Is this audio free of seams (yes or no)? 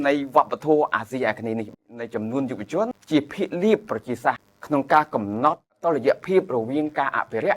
no